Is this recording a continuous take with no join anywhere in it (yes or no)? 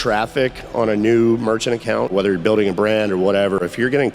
no